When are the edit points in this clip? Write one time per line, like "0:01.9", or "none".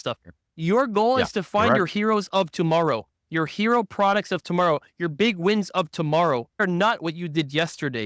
0:06.6